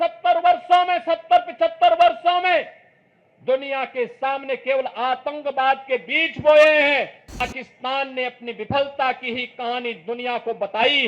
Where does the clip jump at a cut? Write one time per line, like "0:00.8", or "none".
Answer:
0:07.4